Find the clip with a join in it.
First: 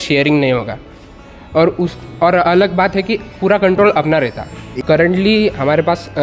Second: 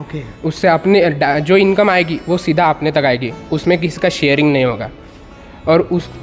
first; 1 cut; at 4.8 s

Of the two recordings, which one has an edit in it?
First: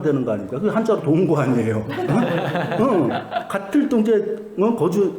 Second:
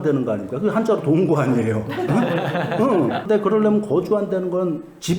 second; 1 cut; at 3.2 s

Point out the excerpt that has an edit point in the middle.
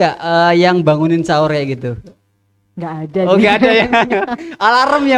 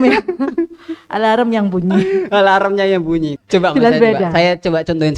second; 1 cut; at 3.3 s

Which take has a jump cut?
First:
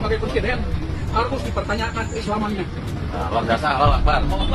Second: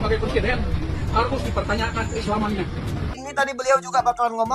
second; 1 cut; at 3.1 s

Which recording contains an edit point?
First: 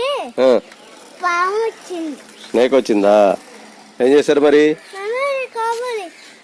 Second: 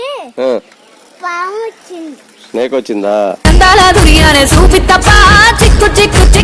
second; 1 cut; at 3.5 s

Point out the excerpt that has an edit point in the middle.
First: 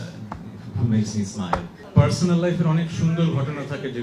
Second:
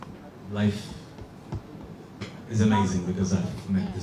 first; 1 cut; at 1.8 s

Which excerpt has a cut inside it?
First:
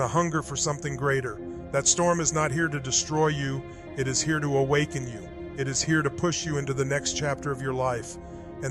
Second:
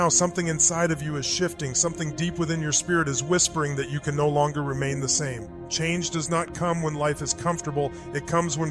first; 1 cut; at 2.9 s

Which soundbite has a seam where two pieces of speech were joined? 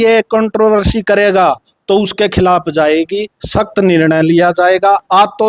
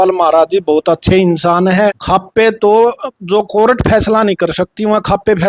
second; 1 cut; at 2.0 s

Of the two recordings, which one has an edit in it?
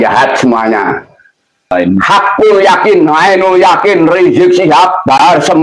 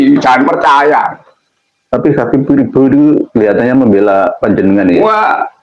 first; 1 cut; at 1.7 s

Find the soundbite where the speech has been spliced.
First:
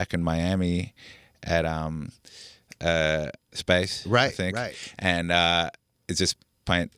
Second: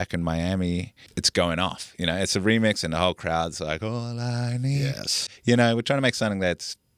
second; 2 cuts; at 1.2 s, 5.3 s

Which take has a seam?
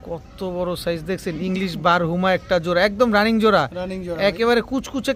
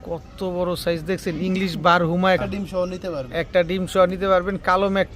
second; 1 cut; at 2.4 s

